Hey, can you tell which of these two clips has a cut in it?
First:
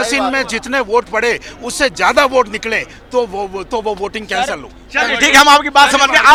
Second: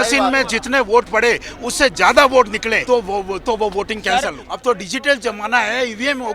second; 2 cuts; at 2.8 s, 4.5 s

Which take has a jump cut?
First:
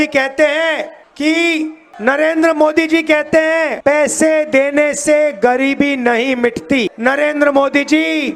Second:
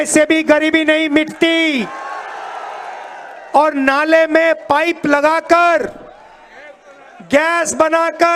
first; 4 cuts; at 1.0 s, 1.8 s, 3.8 s, 6.9 s

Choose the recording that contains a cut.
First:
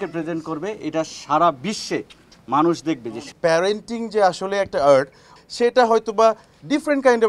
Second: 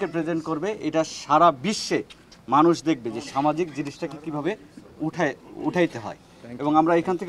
first; 2 cuts; at 3.2 s, 5.3 s

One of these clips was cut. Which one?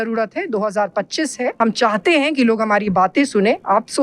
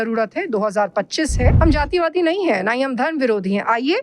second; 1 cut; at 1.5 s

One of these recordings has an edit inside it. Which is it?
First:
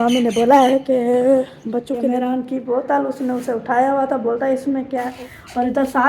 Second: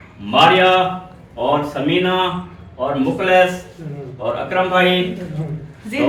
first; 2 cuts; at 2.0 s, 5.1 s

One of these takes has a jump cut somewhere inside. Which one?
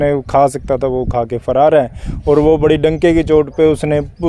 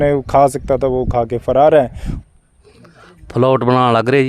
second; 1 cut; at 2.1 s

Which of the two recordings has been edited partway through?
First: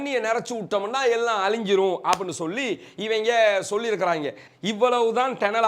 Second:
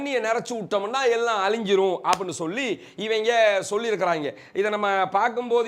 first; 1 cut; at 4.4 s

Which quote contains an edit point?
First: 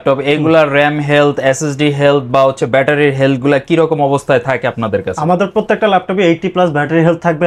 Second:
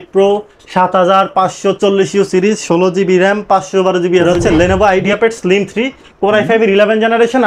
second; 1 cut; at 4.3 s

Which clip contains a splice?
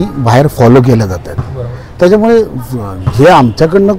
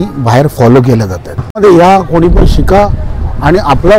second; 1 cut; at 1.6 s

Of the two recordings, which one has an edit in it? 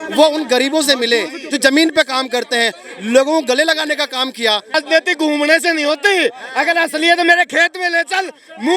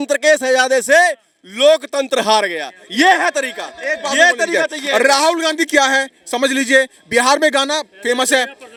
first; 1 cut; at 4.7 s

